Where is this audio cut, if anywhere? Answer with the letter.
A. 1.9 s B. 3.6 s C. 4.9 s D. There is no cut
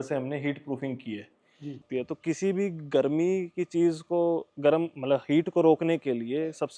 A